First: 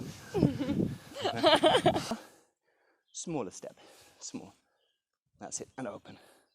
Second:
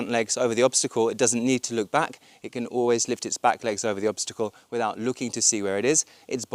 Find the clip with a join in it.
first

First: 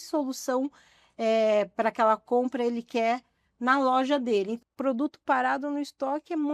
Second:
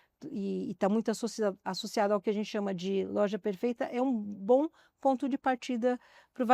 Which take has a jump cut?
first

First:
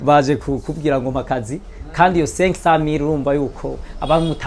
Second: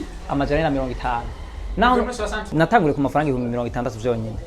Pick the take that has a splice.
second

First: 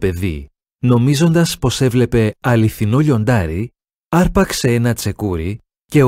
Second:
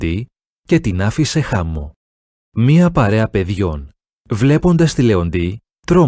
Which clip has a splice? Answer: first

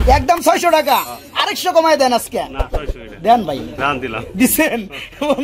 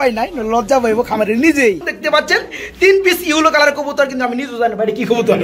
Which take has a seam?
second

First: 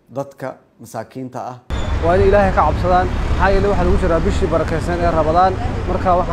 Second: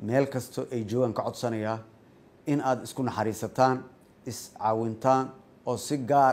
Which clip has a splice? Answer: first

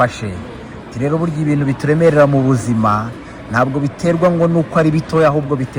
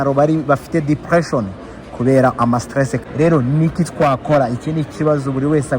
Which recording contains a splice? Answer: second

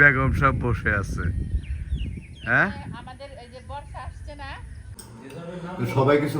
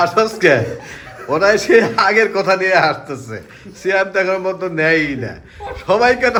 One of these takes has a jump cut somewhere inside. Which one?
first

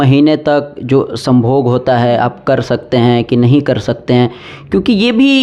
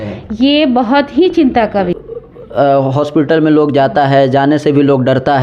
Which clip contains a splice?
second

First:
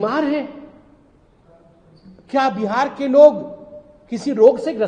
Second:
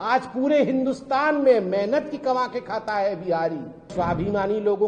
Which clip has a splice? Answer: second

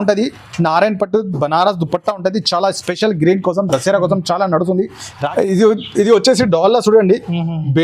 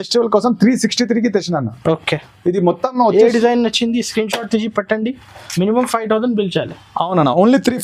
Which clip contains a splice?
first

